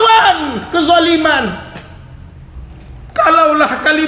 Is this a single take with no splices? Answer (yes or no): no